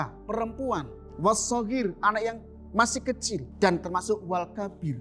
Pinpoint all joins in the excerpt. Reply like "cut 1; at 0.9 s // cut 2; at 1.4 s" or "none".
cut 1; at 1.0 s // cut 2; at 3.5 s